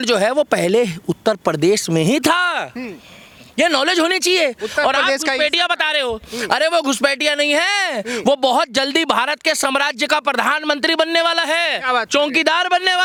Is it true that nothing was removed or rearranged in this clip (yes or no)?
yes